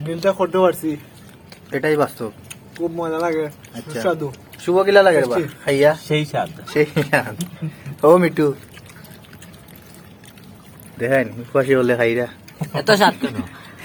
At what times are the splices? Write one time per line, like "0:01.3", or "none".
none